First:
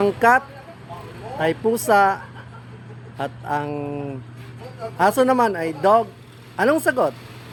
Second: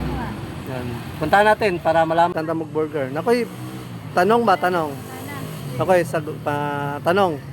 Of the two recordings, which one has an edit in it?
second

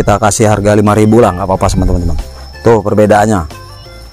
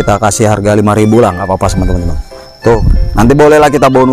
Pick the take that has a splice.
second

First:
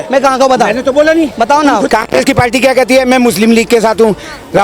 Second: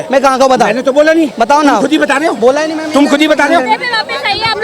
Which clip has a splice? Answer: first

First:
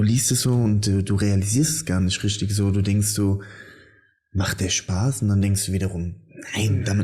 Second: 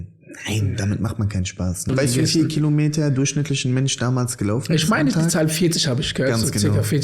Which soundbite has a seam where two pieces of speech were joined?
second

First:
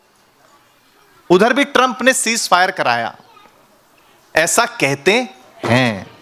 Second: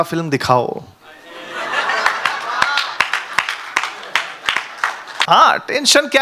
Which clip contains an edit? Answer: second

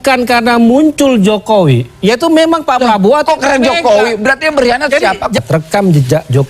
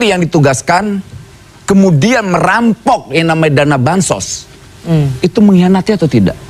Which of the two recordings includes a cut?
first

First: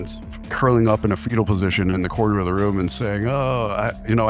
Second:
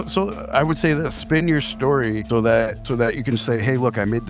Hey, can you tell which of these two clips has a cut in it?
second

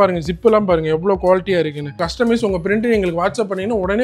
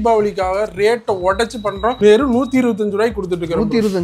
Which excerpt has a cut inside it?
first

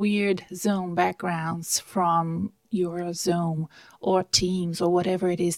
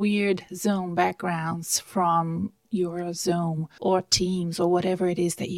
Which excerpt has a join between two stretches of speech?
second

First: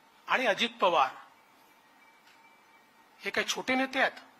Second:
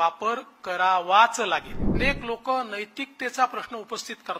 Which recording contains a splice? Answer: second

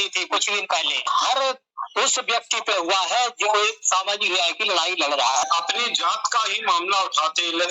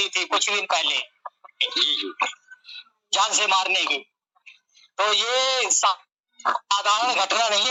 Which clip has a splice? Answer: first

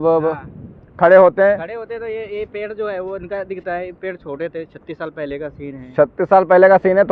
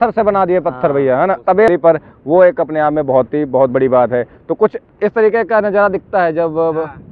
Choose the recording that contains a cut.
second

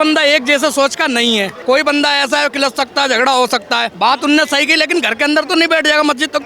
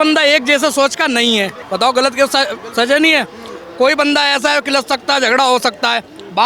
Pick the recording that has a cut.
first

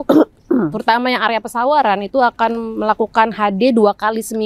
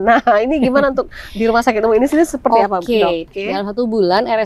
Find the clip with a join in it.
second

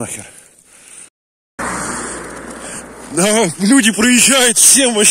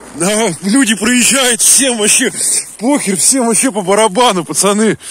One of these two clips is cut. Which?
first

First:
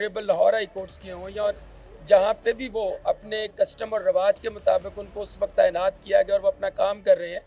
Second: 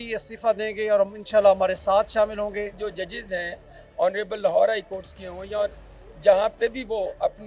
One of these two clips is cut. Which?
second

